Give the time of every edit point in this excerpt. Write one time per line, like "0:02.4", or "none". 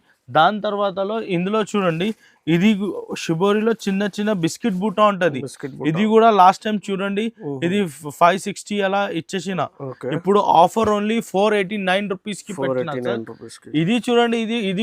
none